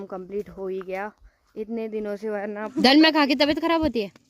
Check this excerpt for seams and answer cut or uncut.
cut